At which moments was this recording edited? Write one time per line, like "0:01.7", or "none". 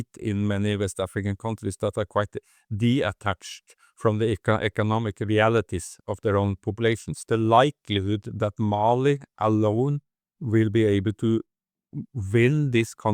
0:07.1